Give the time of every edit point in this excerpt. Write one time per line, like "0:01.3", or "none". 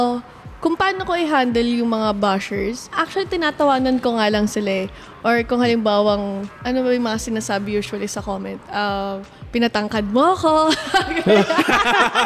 0:03.0
0:06.6